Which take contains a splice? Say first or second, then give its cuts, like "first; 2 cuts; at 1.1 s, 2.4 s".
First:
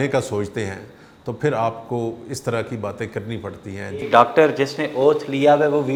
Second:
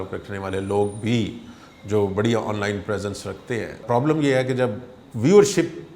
second; 2 cuts; at 3.8 s, 4.9 s